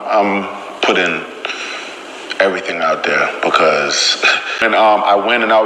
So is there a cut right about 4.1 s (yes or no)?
yes